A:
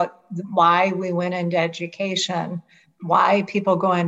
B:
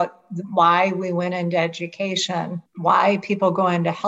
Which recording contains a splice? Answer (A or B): B